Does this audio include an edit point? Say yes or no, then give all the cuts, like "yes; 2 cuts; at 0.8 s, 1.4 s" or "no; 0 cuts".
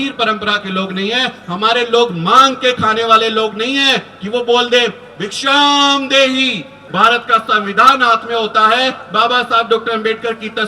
yes; 1 cut; at 6.8 s